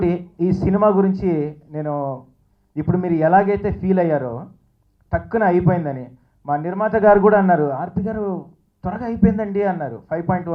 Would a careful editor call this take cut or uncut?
uncut